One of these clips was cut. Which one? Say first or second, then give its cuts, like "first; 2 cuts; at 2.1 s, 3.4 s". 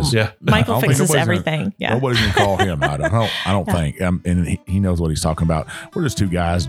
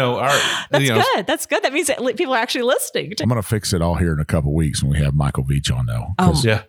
second; 1 cut; at 3.1 s